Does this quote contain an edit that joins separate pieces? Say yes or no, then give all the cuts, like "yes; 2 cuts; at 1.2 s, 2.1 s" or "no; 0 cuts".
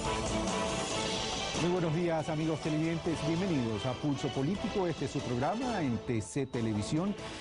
yes; 1 cut; at 1.0 s